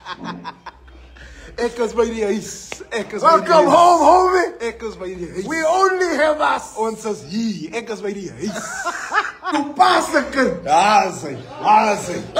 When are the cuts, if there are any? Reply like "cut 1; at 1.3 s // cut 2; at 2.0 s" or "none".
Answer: cut 1; at 9.5 s